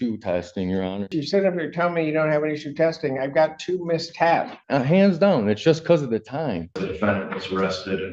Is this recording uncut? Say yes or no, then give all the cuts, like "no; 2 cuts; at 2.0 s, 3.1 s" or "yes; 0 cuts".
no; 3 cuts; at 1.2 s, 4.6 s, 6.9 s